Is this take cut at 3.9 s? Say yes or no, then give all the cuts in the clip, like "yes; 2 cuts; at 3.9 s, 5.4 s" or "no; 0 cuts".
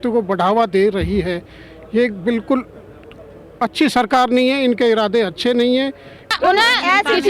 no; 1 cut; at 6.3 s